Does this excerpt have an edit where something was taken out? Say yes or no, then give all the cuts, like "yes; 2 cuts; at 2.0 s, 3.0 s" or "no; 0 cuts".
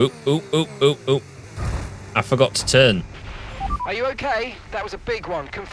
no; 0 cuts